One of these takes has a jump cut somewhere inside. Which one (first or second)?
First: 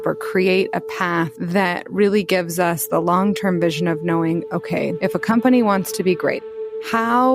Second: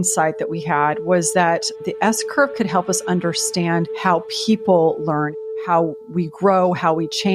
first